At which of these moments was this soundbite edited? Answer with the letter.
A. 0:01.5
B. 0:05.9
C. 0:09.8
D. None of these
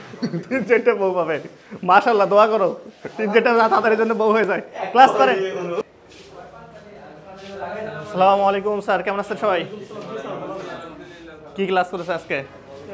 B